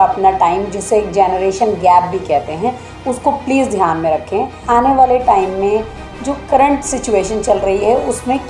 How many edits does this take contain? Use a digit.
1